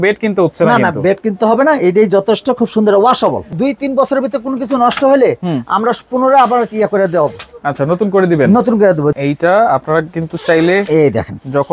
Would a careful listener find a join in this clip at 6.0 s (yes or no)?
no